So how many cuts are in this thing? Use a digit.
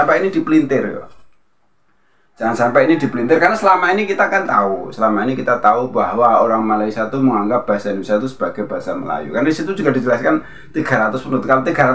0